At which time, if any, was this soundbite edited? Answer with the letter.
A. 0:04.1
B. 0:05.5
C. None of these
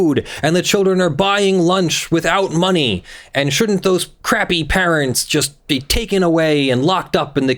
A